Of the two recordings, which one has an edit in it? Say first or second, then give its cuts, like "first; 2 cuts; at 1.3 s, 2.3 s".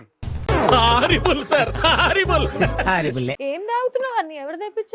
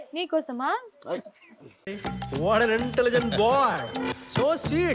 first; 1 cut; at 3.4 s